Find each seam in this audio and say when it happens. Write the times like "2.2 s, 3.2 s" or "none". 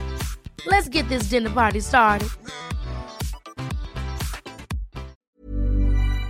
5.2 s